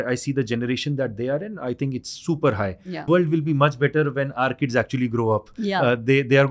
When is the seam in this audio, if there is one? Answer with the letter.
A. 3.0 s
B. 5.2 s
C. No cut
A